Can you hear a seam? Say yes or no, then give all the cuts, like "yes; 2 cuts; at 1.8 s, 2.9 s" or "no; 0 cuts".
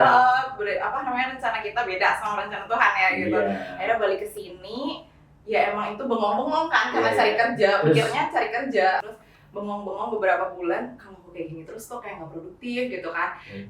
yes; 1 cut; at 9.0 s